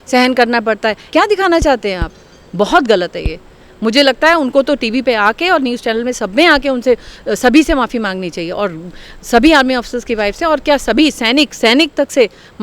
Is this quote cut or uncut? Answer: cut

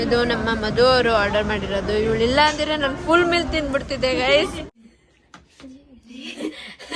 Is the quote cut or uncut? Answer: cut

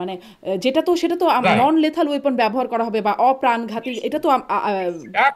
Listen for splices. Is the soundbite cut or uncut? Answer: uncut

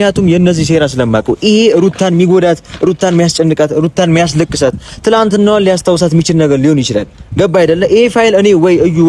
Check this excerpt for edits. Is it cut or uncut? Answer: uncut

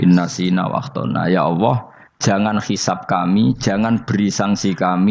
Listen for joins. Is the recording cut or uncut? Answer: uncut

